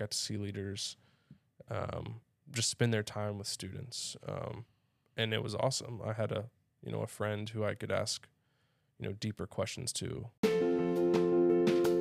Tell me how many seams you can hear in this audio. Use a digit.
1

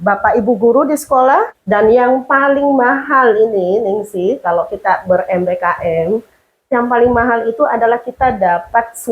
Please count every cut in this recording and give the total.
1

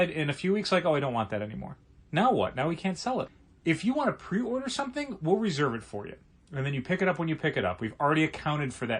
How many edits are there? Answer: 1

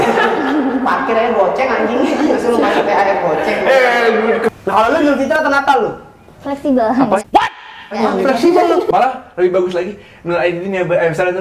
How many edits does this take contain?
2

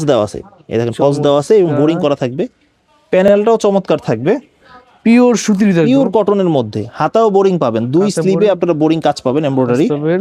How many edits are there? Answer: 0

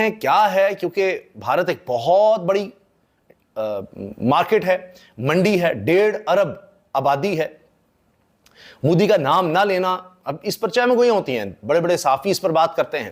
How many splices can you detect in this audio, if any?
0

